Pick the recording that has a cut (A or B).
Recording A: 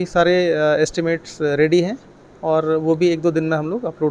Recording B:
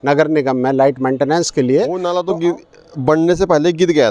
B